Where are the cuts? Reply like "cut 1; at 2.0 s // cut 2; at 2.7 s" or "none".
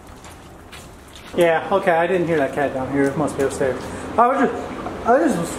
cut 1; at 1.3 s